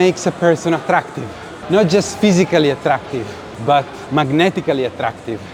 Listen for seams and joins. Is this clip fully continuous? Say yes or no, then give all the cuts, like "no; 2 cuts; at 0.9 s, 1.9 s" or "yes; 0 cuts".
yes; 0 cuts